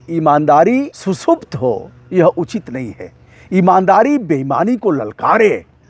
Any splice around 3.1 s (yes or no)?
no